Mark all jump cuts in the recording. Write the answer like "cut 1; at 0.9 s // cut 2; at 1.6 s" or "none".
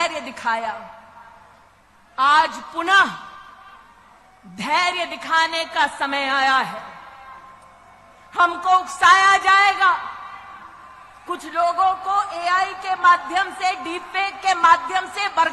none